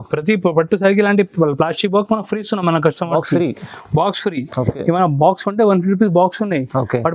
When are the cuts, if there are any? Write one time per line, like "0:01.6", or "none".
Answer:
none

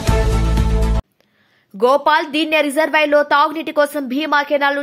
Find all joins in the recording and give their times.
0:01.0

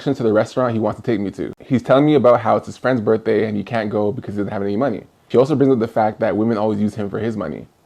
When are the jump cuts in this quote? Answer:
0:01.5

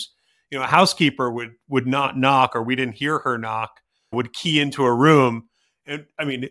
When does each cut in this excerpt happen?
0:04.1

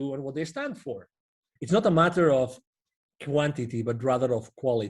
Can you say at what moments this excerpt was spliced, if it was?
0:01.5

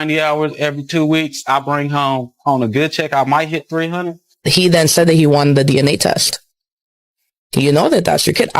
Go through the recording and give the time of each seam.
0:04.2

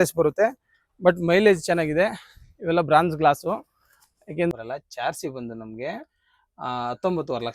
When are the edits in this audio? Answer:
0:04.5

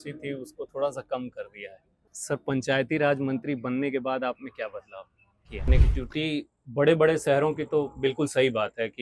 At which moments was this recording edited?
0:02.1
0:05.7

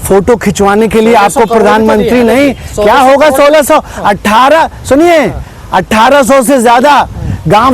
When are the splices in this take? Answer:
none

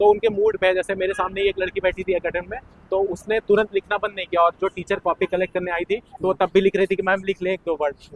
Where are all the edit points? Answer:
none

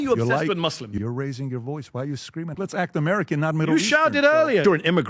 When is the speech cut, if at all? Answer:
0:01.0
0:02.5

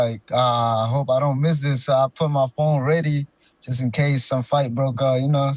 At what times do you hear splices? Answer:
none

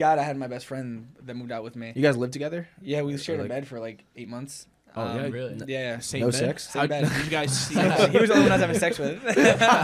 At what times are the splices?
none

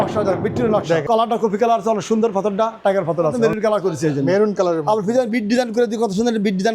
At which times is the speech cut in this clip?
0:01.0
0:03.3

